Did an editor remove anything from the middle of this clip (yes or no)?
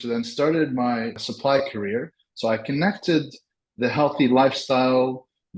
yes